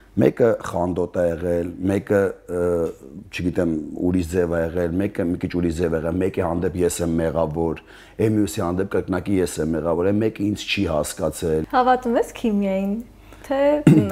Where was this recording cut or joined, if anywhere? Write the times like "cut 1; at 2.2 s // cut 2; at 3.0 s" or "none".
cut 1; at 11.7 s

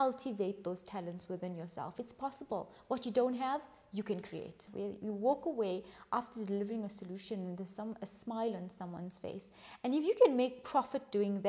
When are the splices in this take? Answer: cut 1; at 4.6 s

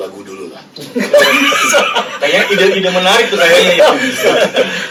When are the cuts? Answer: none

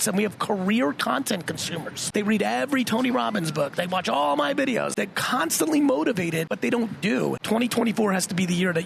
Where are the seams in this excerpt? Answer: cut 1; at 1.9 s // cut 2; at 4.9 s // cut 3; at 6.5 s // cut 4; at 7.4 s

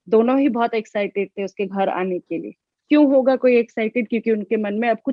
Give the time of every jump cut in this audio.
none

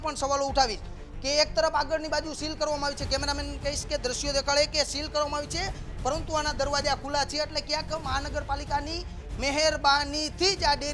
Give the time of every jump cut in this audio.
none

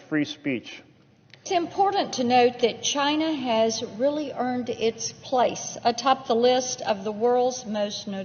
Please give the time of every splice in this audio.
cut 1; at 1.4 s

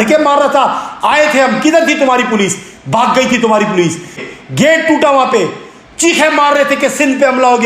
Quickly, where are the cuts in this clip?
cut 1; at 4.2 s

